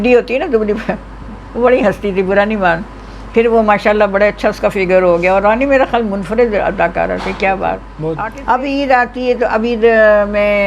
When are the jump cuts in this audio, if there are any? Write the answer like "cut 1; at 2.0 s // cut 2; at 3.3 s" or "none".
cut 1; at 8.3 s